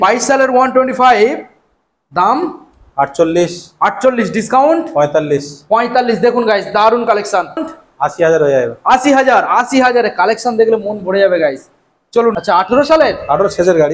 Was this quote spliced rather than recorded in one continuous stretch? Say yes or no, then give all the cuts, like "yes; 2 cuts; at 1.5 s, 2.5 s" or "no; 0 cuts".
yes; 2 cuts; at 7.7 s, 12.3 s